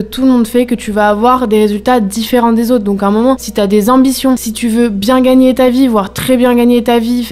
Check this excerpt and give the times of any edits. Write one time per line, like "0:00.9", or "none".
none